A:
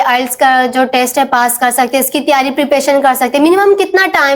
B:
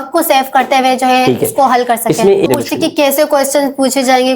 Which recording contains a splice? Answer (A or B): B